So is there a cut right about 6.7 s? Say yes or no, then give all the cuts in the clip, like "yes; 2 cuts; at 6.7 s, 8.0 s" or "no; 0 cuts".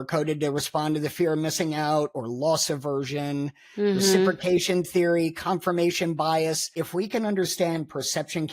yes; 1 cut; at 6.7 s